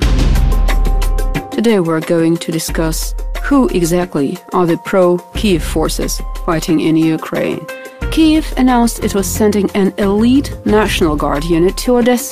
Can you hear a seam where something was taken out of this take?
yes; 1 cut; at 5.7 s

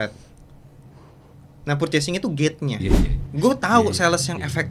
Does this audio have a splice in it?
yes; 1 cut; at 2.8 s

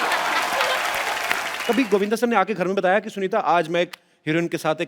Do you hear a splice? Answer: yes; 1 cut; at 1.5 s

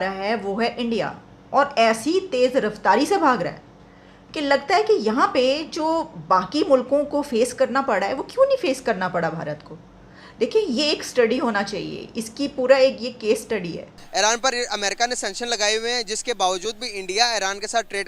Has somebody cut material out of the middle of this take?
yes; 1 cut; at 14.0 s

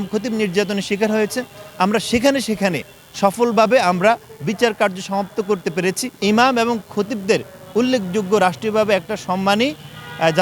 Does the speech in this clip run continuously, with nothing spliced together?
no; 1 cut; at 6.1 s

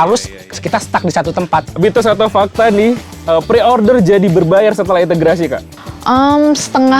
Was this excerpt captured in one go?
no; 1 cut; at 1.7 s

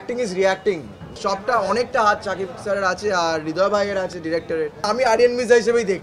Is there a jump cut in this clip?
yes; 2 cuts; at 1.2 s, 4.8 s

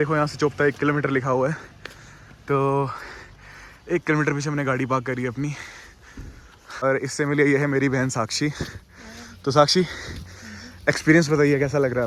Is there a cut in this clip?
no; 0 cuts

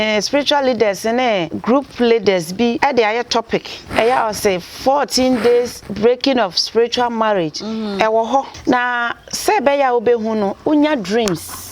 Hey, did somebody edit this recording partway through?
yes; 5 cuts; at 1.5 s, 2.8 s, 3.8 s, 5.8 s, 8.5 s

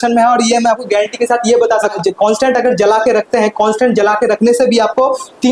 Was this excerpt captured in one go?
no; 1 cut; at 1.9 s

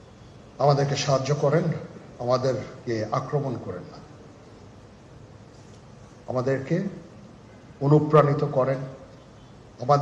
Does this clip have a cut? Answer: yes; 1 cut; at 5.1 s

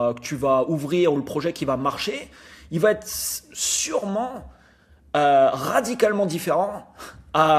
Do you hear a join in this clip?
no; 0 cuts

